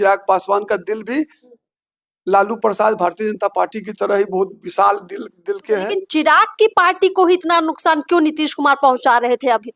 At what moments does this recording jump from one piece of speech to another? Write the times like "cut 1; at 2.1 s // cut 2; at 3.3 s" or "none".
cut 1; at 5.9 s